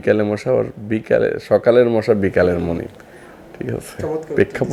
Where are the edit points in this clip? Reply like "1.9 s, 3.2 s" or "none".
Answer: none